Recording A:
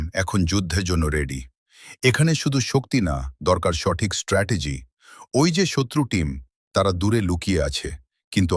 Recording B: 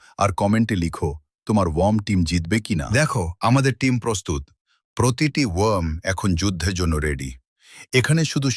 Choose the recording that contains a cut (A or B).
B